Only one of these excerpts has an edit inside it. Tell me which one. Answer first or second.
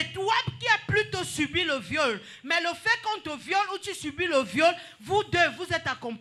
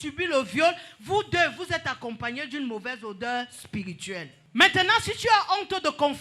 second